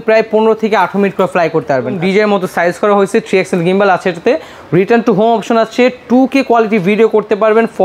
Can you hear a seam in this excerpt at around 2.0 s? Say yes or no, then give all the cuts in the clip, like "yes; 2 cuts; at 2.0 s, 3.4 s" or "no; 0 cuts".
yes; 1 cut; at 2.0 s